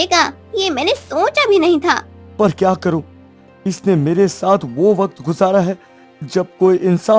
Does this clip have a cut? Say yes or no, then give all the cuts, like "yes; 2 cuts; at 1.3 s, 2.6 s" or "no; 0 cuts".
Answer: yes; 1 cut; at 2.2 s